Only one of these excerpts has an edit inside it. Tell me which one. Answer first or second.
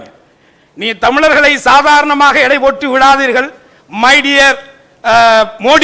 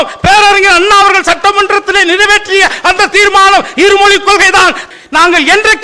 second